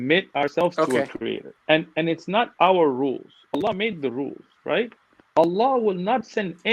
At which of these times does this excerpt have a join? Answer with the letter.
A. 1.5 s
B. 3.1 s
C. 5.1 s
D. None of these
A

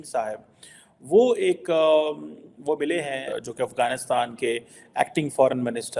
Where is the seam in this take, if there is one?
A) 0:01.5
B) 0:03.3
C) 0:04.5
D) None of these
B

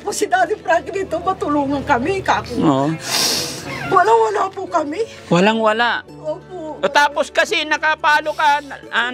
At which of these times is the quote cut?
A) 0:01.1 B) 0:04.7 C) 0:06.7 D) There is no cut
C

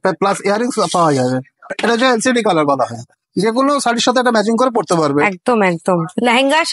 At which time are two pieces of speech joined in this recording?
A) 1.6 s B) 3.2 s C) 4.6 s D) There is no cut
D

